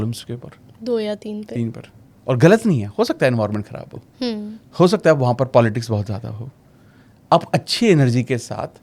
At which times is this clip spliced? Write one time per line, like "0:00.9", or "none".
none